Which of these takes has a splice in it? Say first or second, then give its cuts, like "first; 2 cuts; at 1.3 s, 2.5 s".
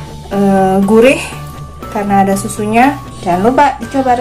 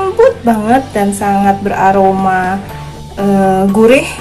first; 1 cut; at 3.1 s